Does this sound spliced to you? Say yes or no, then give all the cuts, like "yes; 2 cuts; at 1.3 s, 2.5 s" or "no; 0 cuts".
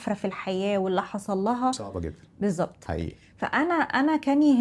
no; 0 cuts